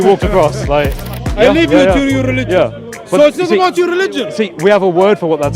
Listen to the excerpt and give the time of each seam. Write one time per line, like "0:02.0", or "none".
0:01.0

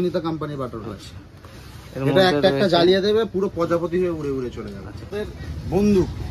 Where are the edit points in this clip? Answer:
0:05.0

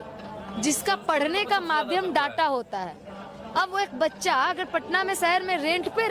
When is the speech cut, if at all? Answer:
none

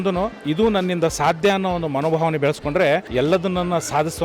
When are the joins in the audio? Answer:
0:03.1

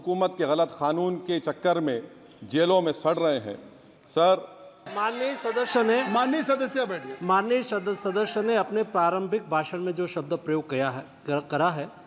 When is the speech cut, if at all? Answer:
0:04.9

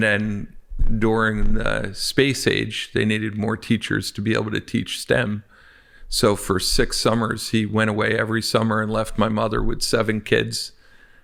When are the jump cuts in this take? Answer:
none

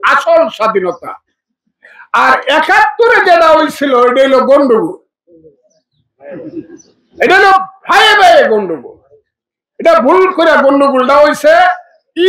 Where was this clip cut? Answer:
none

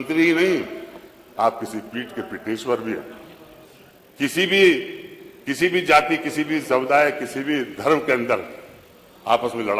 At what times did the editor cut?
none

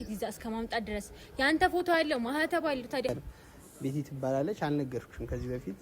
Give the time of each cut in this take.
0:03.1

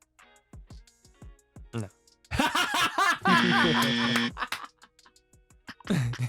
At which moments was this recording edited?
none

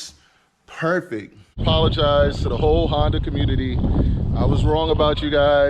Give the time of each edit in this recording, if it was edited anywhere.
0:01.6

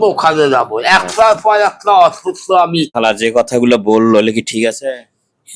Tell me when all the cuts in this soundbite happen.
0:02.9

